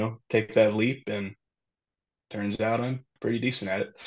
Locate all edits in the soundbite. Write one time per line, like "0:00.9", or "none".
0:03.1